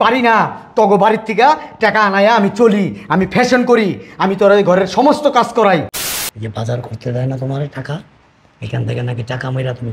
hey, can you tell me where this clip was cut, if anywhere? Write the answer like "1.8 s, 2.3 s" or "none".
5.9 s